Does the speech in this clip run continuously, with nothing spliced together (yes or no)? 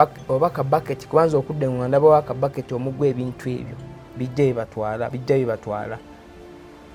yes